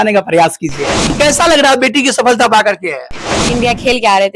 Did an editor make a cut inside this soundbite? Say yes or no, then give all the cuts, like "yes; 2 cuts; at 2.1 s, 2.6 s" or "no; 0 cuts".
yes; 2 cuts; at 1.1 s, 3.3 s